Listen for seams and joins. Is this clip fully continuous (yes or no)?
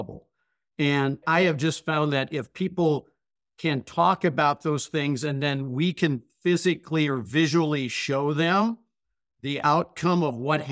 no